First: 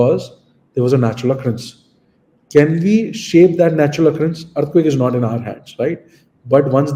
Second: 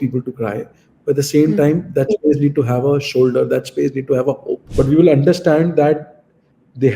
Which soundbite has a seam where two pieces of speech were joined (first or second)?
second